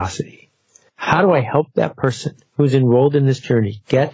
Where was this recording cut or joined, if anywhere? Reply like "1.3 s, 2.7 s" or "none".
none

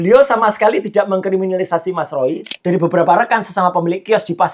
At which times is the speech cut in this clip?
2.4 s

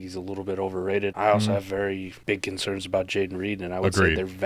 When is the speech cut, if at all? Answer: 1.1 s, 2.1 s

